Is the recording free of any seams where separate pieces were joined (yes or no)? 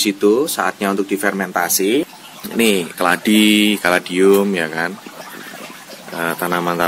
no